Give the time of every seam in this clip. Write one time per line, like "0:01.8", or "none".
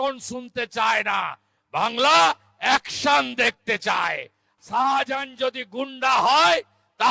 0:04.5

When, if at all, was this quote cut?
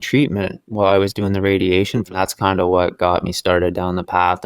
0:02.1

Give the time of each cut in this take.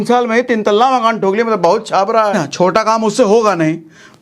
0:02.3

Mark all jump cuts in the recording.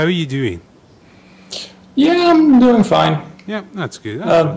0:03.2

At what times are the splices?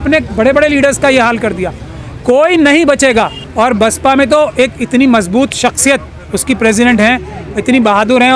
0:03.4

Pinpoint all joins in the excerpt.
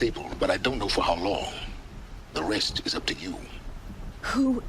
0:03.2

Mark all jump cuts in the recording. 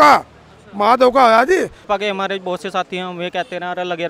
0:01.8

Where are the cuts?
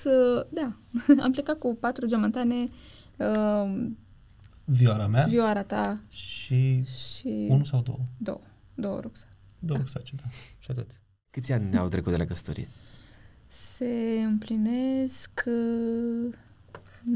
0:11.2

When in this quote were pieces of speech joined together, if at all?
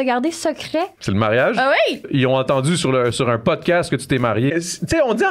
0:01.0
0:02.1
0:04.5

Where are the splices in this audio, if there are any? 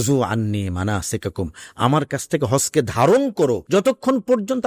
0:03.6

